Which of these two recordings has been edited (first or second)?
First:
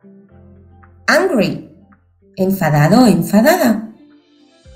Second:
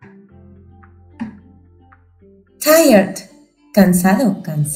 first